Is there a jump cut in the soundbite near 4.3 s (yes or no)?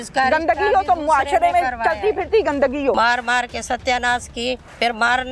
no